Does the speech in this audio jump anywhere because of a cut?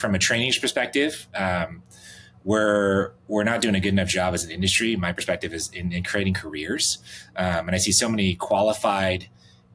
no; 0 cuts

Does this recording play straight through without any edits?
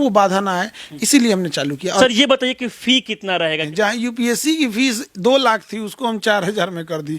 no; 2 cuts; at 2.0 s, 3.6 s

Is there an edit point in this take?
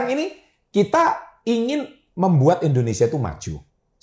no; 0 cuts

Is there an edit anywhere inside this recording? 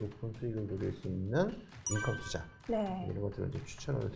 no; 0 cuts

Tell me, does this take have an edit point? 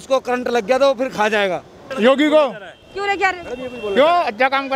yes; 1 cut; at 1.8 s

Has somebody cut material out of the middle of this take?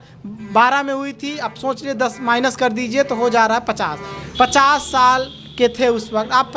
no; 0 cuts

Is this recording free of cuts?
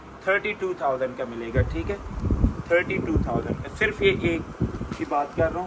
yes; 0 cuts

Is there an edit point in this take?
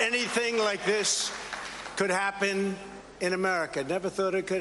no; 0 cuts

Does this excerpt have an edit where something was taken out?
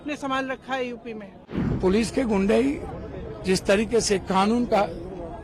yes; 1 cut; at 1.6 s

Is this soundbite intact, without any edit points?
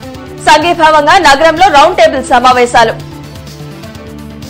no; 1 cut; at 3.0 s

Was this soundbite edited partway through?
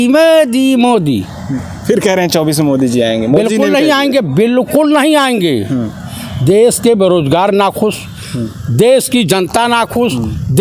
no; 0 cuts

